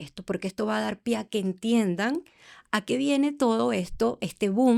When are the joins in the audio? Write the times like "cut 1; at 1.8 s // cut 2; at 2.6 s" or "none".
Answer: none